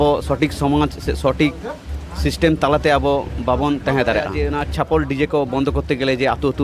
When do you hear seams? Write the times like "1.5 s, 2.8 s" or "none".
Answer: 4.4 s